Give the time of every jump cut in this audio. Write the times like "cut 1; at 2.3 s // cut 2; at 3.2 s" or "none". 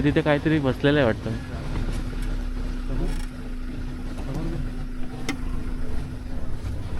none

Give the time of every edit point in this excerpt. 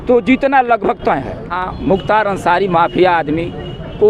cut 1; at 1.6 s

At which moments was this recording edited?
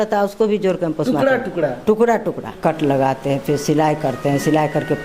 cut 1; at 2.6 s

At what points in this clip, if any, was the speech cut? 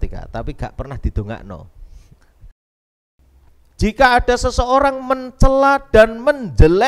cut 1; at 2.7 s

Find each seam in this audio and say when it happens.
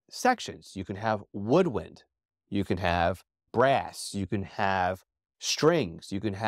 cut 1; at 3.5 s

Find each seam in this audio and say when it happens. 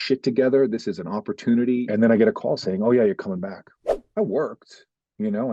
cut 1; at 1.8 s // cut 2; at 4.0 s

